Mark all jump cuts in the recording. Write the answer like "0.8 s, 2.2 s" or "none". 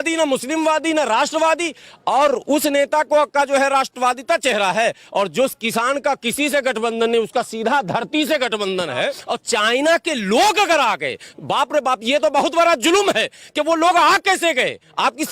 9.2 s